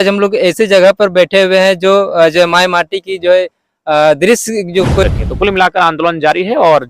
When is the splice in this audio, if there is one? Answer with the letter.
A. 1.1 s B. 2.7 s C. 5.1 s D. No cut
C